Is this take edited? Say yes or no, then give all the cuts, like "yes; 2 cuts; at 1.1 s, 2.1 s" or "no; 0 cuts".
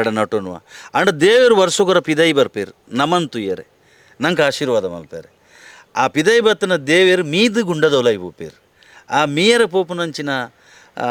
no; 0 cuts